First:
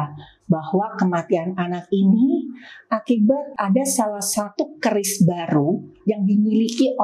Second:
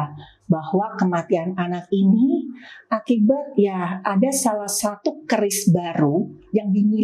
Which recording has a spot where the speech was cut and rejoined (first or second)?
first